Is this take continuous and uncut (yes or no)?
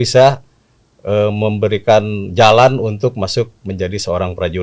yes